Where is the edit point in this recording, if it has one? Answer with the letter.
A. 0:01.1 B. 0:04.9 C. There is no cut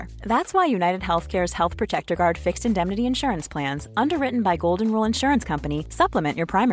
C